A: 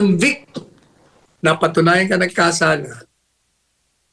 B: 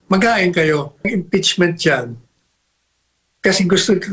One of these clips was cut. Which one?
B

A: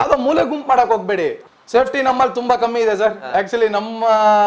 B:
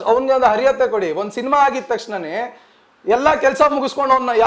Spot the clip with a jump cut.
A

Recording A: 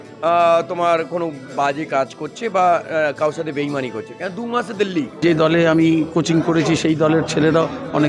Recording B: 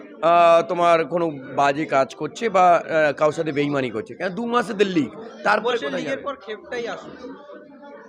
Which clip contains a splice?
A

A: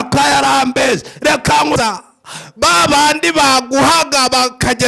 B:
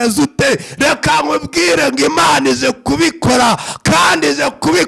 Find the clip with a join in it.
A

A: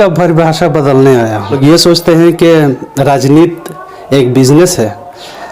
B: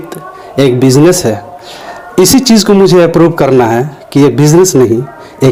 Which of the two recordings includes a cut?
A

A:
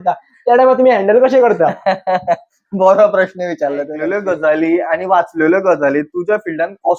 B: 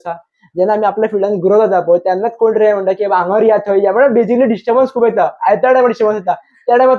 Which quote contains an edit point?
A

